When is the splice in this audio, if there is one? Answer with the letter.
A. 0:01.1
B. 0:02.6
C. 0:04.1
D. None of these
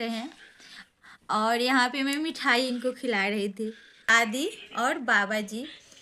C